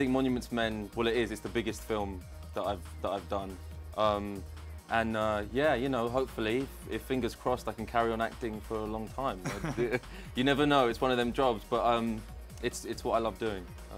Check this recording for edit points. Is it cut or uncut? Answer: cut